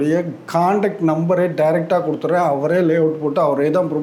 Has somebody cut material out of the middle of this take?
no; 0 cuts

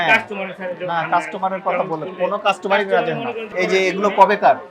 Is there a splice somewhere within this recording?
yes; 1 cut; at 3.5 s

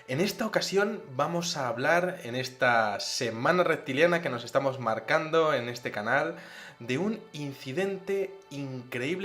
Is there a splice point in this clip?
yes; 1 cut; at 7.0 s

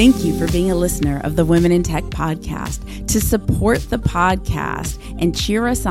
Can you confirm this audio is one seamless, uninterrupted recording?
yes; 0 cuts

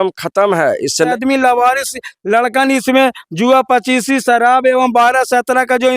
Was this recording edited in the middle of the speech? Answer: yes; 1 cut; at 1.1 s

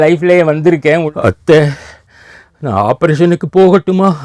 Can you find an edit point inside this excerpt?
yes; 1 cut; at 1.1 s

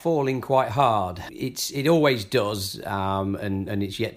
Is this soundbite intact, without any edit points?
no; 1 cut; at 1.2 s

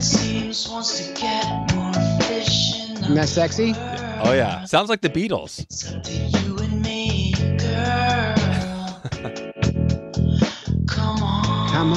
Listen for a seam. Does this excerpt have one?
no; 0 cuts

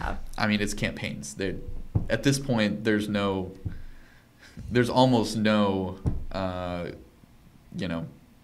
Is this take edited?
no; 0 cuts

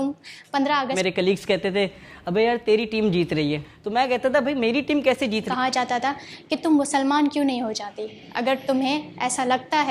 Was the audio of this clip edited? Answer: yes; 2 cuts; at 0.9 s, 5.5 s

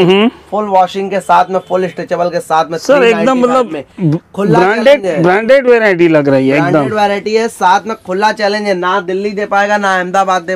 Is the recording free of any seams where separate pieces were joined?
yes; 0 cuts

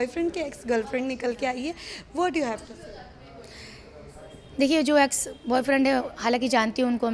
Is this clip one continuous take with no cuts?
yes; 0 cuts

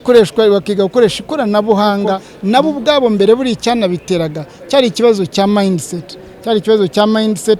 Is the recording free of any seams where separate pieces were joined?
no; 1 cut; at 2.3 s

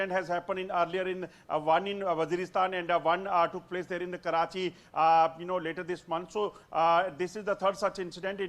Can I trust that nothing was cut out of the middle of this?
yes; 0 cuts

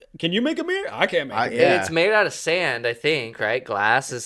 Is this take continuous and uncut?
yes; 0 cuts

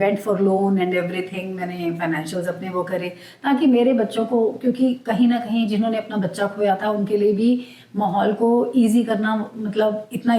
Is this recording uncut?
yes; 0 cuts

